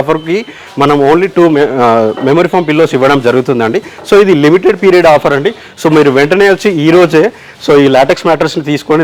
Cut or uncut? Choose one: uncut